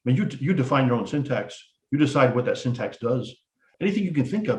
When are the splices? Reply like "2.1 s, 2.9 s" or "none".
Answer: 3.7 s